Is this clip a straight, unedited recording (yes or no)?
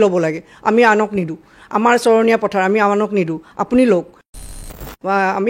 no